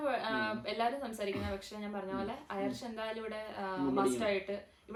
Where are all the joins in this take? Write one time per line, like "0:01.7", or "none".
none